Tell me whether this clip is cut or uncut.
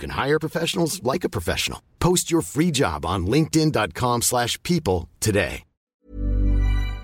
cut